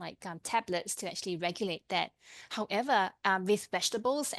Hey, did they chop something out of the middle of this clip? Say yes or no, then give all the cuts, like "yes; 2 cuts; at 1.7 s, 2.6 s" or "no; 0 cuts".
no; 0 cuts